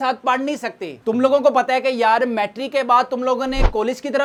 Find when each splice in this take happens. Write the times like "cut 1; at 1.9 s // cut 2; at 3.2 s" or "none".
none